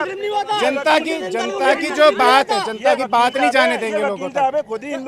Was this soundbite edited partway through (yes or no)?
no